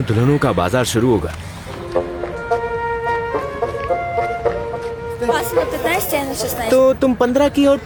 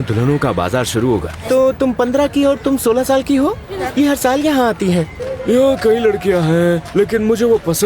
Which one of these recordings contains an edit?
second; 3 cuts; at 1.4 s, 3.7 s, 5.2 s

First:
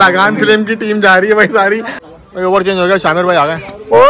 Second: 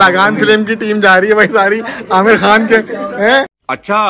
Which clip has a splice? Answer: first; 1 cut; at 1.9 s

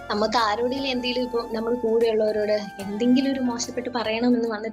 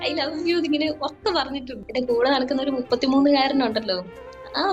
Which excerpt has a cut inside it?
second; 1 cut; at 1.7 s

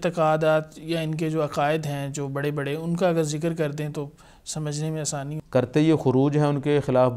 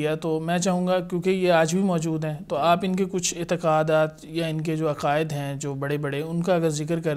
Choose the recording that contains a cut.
first; 1 cut; at 5.4 s

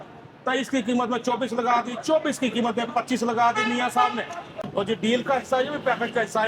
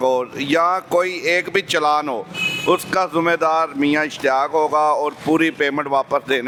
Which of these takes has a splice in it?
first; 1 cut; at 4.6 s

